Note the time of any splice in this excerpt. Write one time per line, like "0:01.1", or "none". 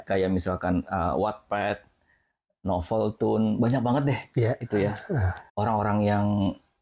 0:05.4